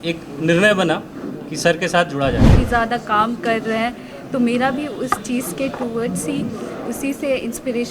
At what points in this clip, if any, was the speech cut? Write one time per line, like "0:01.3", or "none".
0:02.5